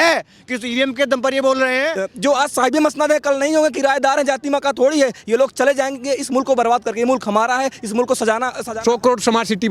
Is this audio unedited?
no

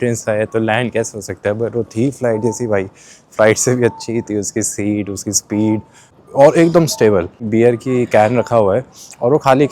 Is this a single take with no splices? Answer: no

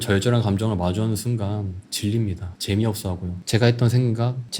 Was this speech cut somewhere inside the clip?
yes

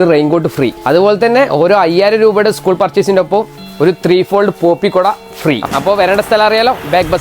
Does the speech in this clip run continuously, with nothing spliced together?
no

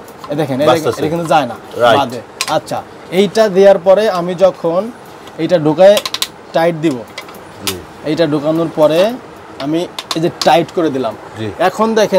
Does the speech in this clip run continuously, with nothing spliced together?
yes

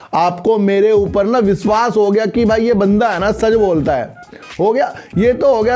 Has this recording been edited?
no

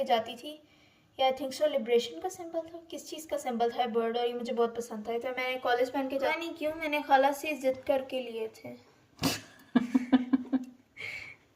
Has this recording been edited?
yes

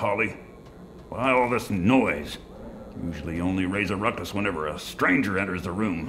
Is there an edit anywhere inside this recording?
no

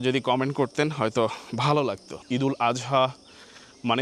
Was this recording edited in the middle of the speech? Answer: yes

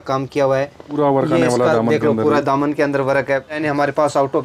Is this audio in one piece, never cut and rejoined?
no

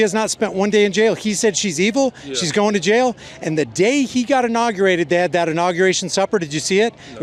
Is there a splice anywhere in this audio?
no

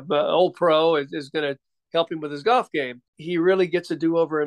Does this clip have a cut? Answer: yes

